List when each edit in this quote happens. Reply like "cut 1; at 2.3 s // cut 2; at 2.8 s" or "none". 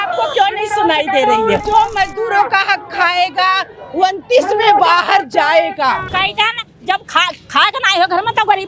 cut 1; at 1.6 s // cut 2; at 6.0 s